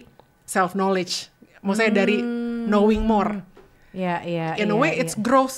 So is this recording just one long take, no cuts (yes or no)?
yes